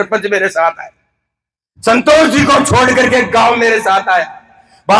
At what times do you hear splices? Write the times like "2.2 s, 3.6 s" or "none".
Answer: none